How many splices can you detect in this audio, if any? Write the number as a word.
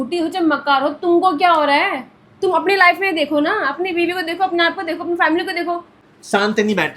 one